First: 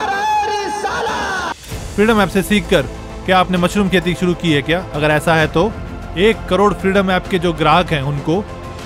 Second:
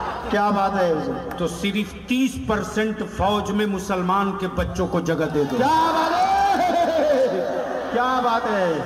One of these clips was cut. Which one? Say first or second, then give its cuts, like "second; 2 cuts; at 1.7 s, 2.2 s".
first; 1 cut; at 1.6 s